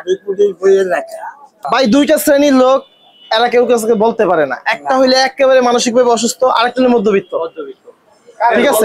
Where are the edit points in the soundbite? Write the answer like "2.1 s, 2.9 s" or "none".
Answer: 1.5 s